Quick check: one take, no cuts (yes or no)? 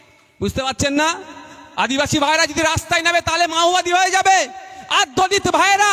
yes